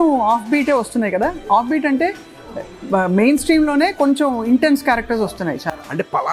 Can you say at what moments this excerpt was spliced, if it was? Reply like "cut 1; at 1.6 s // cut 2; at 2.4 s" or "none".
none